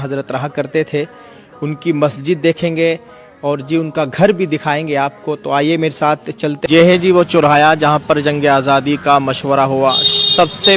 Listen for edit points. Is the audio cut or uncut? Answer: cut